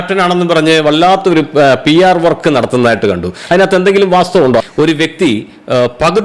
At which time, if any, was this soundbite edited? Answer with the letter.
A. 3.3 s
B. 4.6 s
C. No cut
B